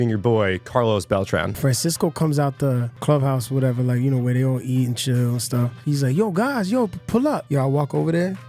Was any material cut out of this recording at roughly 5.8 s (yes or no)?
yes